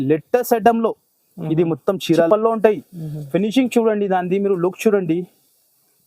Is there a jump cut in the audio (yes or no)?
yes